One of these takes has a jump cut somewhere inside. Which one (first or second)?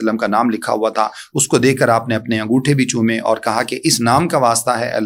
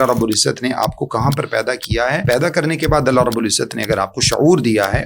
second